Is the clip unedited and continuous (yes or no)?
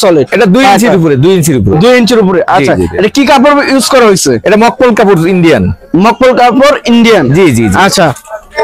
yes